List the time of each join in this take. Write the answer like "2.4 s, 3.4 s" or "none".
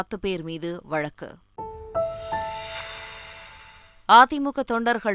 1.7 s, 3.7 s